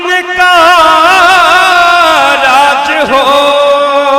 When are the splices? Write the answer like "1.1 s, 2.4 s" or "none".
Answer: none